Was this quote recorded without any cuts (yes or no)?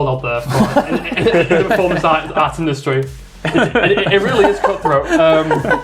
yes